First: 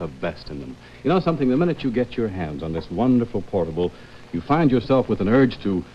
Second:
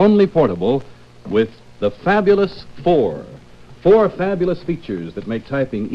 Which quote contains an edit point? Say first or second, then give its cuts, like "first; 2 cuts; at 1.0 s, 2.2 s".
second; 1 cut; at 1.0 s